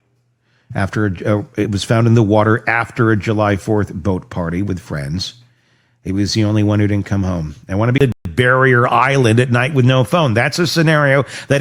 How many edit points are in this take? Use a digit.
1